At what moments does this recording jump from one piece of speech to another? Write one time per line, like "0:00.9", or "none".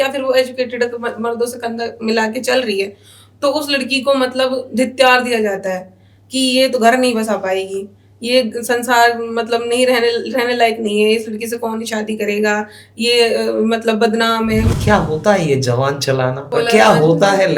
0:14.7
0:16.4